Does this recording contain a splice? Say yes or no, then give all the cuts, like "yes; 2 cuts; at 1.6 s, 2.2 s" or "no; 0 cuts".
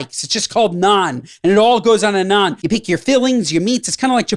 yes; 1 cut; at 2.6 s